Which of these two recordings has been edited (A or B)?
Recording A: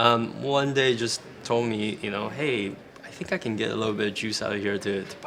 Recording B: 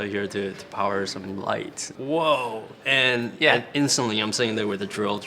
B